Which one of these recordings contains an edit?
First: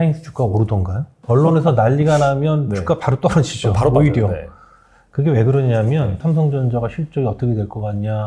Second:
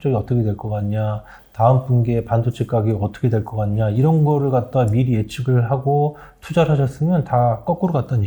first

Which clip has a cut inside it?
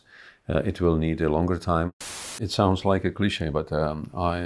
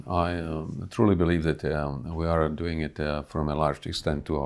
first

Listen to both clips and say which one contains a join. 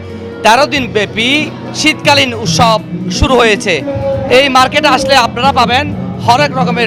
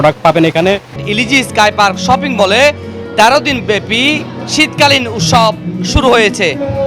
second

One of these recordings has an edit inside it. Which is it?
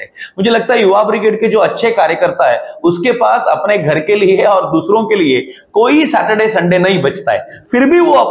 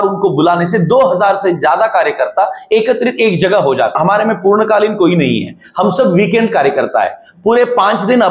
second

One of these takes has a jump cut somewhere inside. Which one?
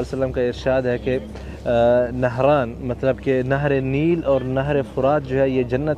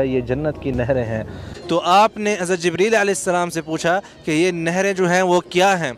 second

